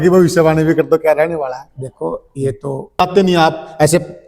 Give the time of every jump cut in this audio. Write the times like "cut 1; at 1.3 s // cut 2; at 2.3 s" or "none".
cut 1; at 3.0 s